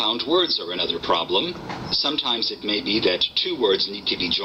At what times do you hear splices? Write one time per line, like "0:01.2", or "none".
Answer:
0:03.3